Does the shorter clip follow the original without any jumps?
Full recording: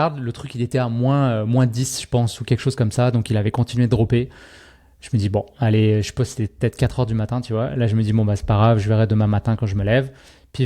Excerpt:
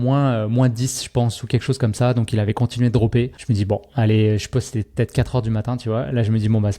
no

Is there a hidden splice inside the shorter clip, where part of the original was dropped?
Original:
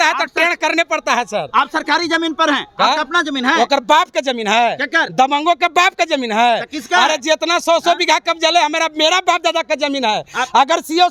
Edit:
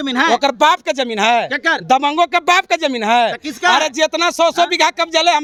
no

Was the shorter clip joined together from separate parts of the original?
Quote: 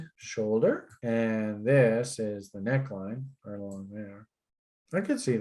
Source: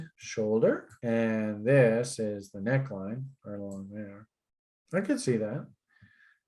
no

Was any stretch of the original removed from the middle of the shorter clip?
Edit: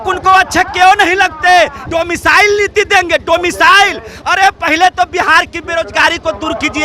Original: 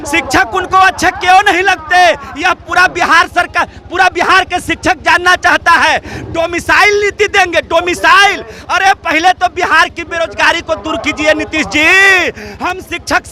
yes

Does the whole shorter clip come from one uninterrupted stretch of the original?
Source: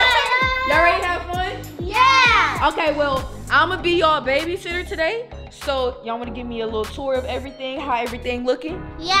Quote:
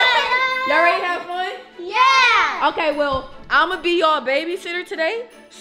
yes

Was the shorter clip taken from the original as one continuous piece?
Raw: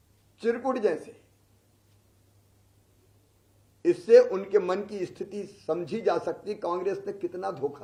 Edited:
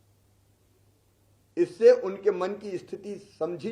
yes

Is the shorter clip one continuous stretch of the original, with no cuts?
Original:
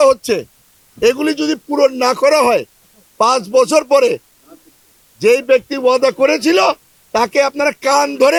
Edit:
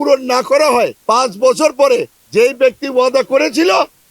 no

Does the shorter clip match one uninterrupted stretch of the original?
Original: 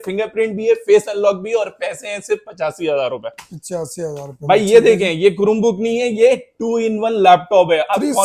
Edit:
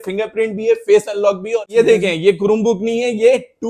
no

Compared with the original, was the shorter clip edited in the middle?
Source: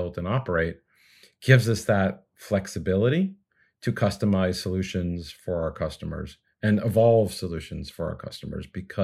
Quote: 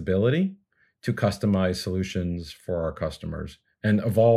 no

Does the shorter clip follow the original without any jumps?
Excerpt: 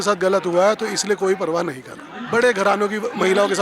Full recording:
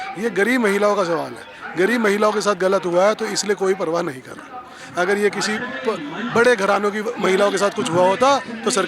no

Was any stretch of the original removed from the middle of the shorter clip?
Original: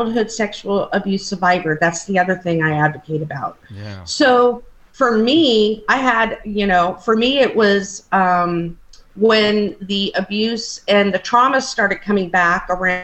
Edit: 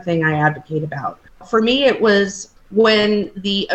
yes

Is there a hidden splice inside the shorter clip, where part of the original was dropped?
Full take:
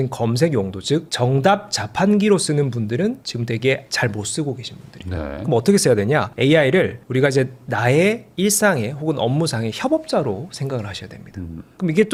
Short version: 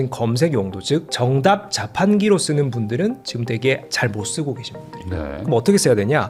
no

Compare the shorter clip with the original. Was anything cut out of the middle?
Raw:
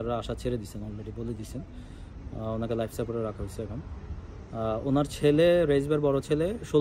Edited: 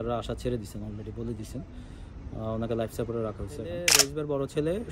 yes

